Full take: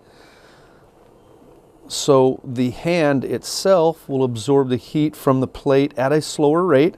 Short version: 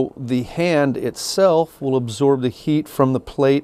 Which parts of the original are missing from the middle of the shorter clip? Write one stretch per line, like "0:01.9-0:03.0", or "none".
none